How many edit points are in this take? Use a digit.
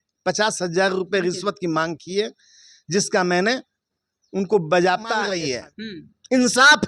1